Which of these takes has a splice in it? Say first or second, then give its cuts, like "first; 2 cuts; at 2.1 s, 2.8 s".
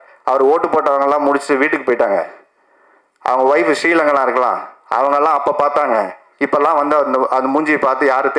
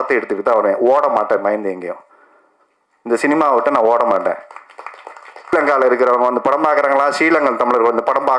second; 1 cut; at 5.5 s